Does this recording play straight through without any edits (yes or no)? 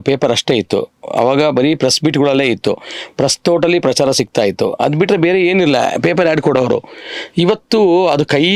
yes